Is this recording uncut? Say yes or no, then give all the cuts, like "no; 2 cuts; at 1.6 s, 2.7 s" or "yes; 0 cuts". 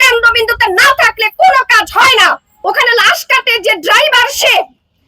no; 1 cut; at 2.5 s